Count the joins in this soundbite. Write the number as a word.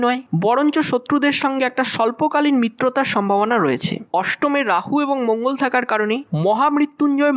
one